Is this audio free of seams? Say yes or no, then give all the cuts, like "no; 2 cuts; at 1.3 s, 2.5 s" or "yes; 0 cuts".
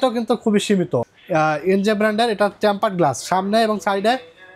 no; 1 cut; at 1.1 s